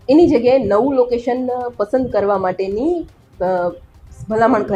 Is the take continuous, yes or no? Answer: yes